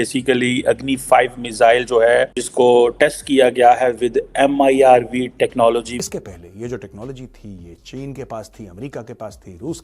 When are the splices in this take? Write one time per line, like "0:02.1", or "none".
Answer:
0:02.4
0:06.0